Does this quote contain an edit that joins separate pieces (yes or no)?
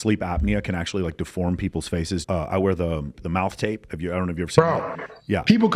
no